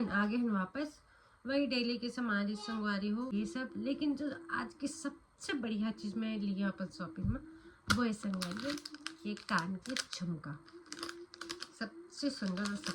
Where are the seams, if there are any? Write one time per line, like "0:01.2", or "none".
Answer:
0:03.3